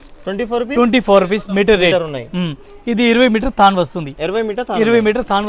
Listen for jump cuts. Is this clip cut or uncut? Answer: uncut